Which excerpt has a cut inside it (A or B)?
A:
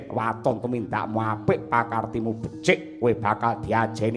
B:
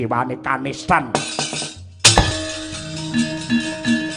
B